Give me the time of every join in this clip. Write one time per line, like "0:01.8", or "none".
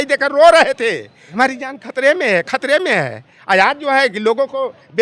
0:01.3